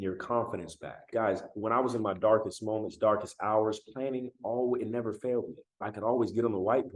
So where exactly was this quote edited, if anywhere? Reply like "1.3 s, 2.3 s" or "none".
1.1 s, 5.9 s